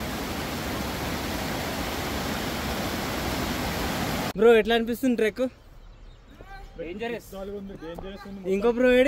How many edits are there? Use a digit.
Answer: 1